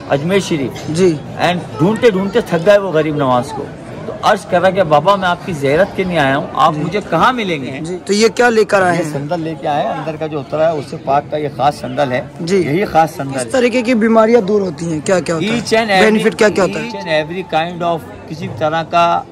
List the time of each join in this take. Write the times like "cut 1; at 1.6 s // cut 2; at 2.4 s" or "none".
cut 1; at 7.7 s // cut 2; at 13.5 s // cut 3; at 16.9 s

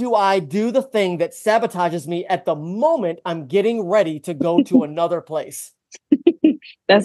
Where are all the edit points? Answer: none

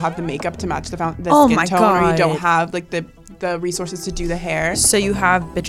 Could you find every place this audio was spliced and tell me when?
none

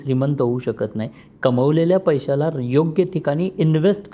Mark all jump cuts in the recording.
none

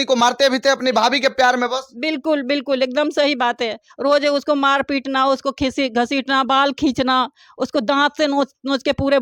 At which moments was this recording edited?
none

